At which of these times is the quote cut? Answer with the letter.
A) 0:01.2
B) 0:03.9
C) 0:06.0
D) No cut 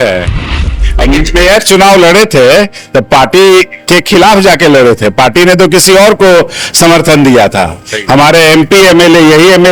D